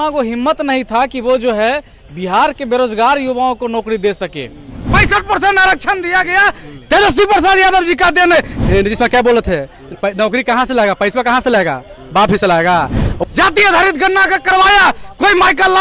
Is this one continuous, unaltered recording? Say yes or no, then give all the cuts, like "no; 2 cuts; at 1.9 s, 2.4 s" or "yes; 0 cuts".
no; 3 cuts; at 4.8 s, 8.5 s, 13.1 s